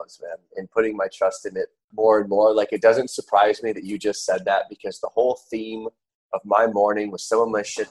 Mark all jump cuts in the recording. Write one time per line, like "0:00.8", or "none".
0:01.8